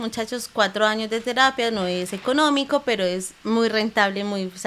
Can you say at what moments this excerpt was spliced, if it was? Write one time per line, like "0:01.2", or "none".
none